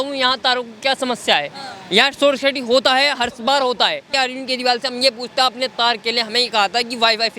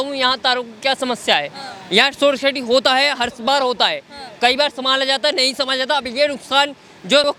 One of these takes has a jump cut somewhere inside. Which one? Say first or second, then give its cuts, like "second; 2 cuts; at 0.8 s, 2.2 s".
first; 1 cut; at 4.1 s